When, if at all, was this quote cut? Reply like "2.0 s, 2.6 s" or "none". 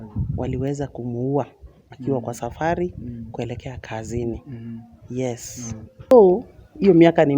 6.1 s